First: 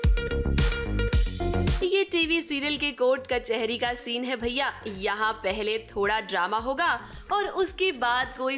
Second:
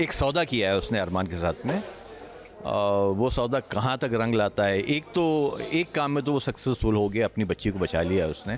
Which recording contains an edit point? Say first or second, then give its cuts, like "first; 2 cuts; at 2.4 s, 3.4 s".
first; 1 cut; at 1.8 s